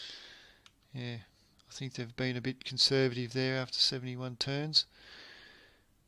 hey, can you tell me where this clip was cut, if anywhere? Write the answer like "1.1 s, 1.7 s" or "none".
4.8 s